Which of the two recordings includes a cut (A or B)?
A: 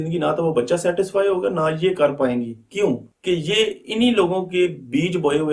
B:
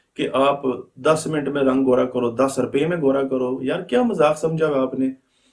A